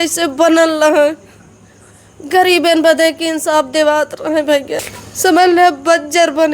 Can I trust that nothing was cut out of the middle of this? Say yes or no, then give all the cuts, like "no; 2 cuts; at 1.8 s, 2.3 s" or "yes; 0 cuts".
no; 1 cut; at 4.8 s